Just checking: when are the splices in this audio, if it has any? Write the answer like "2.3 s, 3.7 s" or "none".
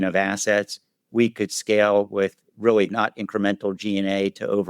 2.4 s

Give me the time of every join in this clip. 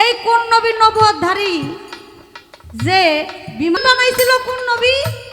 3.8 s

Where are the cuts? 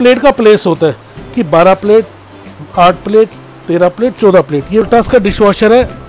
4.8 s

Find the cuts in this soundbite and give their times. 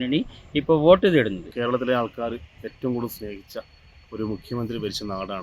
1.5 s

